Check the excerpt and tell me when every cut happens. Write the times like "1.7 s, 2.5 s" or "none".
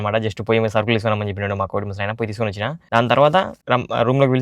2.8 s, 3.6 s